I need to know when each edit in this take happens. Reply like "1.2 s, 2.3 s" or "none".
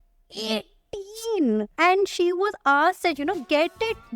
1.7 s